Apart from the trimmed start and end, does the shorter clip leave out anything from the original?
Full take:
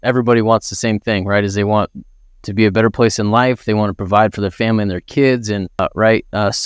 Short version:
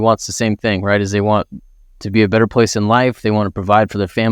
no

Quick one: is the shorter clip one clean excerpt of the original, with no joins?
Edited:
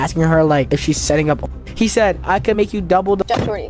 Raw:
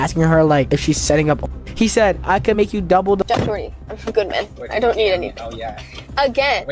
yes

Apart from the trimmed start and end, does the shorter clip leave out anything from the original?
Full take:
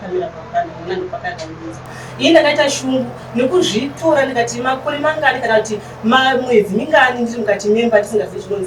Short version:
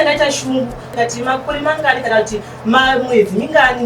yes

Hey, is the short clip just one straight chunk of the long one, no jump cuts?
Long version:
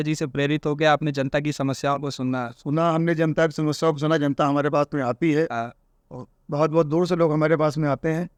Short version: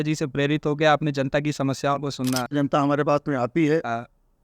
no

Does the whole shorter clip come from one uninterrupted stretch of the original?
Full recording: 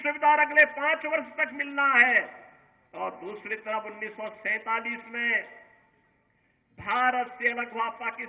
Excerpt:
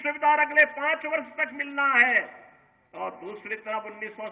yes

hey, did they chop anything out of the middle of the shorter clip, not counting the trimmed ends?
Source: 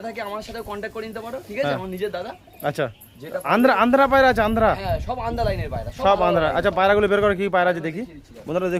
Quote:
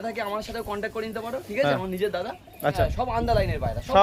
yes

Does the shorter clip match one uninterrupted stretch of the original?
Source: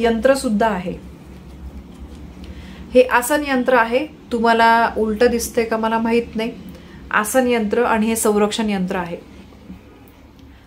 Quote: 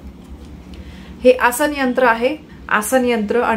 no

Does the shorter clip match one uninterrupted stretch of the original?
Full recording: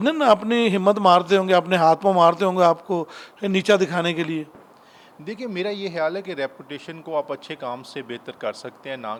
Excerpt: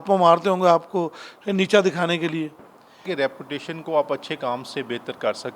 no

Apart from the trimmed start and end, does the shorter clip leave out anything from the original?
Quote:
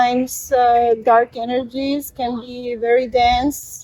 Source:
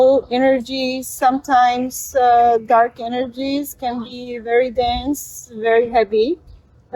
no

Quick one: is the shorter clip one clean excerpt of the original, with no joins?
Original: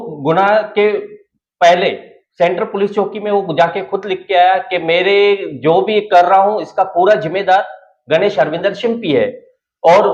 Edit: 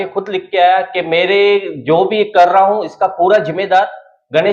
yes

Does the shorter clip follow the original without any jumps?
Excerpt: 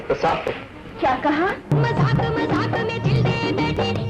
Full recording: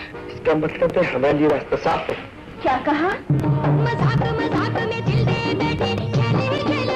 no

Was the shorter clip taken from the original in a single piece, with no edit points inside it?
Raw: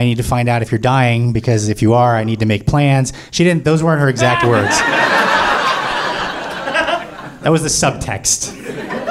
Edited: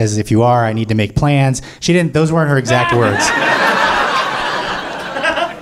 yes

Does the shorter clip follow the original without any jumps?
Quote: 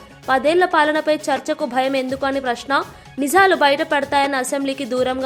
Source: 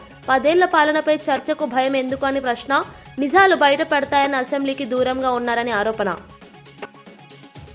yes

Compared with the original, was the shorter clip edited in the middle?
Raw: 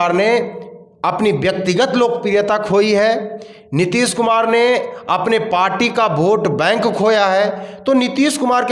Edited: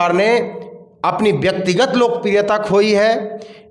no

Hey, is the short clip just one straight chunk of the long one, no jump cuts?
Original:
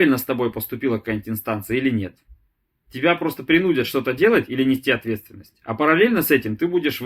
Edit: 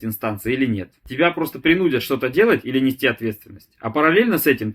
no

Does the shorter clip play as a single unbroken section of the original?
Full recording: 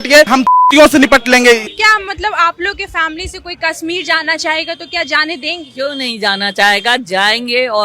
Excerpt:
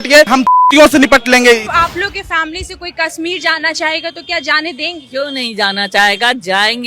no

